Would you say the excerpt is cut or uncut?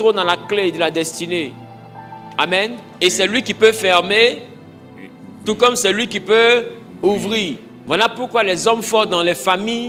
uncut